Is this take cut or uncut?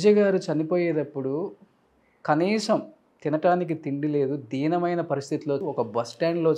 cut